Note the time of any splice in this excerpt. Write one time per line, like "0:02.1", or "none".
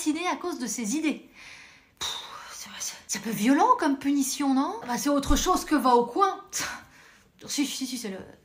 0:05.3